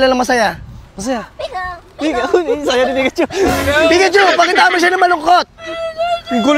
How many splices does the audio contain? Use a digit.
0